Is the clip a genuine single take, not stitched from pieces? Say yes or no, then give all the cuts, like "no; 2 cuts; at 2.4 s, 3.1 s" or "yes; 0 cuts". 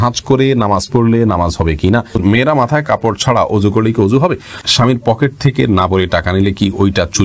no; 2 cuts; at 2.2 s, 4.6 s